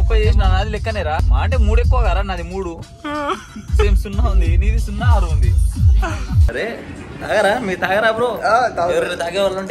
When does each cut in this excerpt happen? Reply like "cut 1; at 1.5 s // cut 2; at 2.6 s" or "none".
cut 1; at 1.3 s // cut 2; at 6.4 s